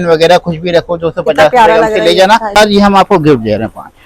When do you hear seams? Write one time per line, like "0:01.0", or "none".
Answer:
0:02.5

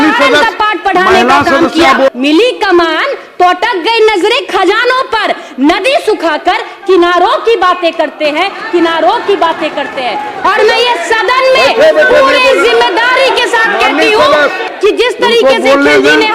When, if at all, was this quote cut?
0:02.1
0:10.3
0:14.6

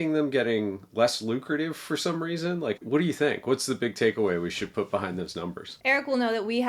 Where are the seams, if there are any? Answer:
0:02.8
0:05.7

